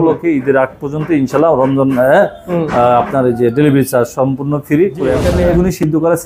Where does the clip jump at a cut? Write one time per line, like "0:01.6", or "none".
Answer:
0:05.2